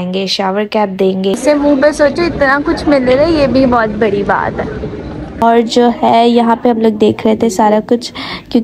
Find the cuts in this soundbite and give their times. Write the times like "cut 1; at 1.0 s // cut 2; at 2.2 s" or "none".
cut 1; at 1.3 s // cut 2; at 5.4 s